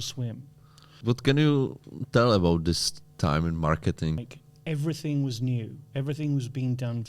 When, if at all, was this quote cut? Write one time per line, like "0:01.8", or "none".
0:01.0
0:04.2